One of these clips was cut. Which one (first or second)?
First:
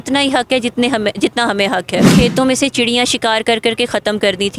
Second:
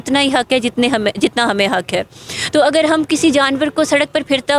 first